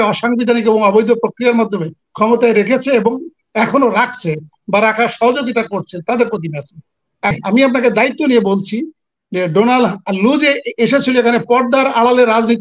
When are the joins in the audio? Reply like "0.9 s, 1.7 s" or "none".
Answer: 7.3 s